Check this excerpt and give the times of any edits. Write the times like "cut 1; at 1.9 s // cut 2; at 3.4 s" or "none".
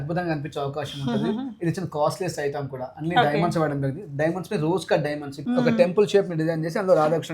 cut 1; at 5.3 s

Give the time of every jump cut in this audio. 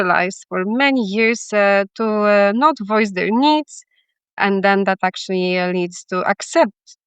cut 1; at 4.4 s

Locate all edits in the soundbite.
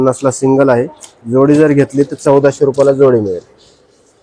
none

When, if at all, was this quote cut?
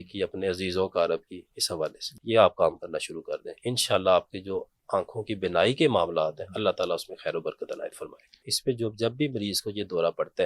cut 1; at 2.1 s // cut 2; at 8.5 s

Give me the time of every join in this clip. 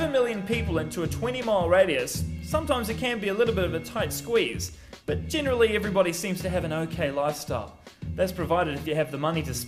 none

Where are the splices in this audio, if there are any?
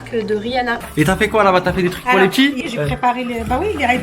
cut 1; at 0.9 s // cut 2; at 2.6 s

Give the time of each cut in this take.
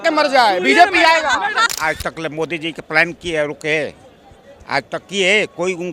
cut 1; at 1.7 s

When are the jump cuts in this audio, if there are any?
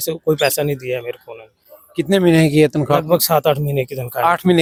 none

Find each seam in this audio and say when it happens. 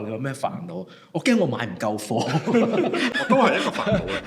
none

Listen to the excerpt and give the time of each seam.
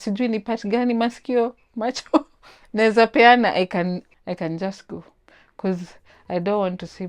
cut 1; at 4.1 s

